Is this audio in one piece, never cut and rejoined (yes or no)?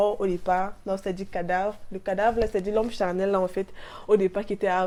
yes